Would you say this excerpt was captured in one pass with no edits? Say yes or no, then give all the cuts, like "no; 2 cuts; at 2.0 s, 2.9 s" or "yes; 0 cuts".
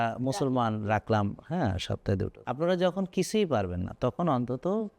no; 1 cut; at 2.3 s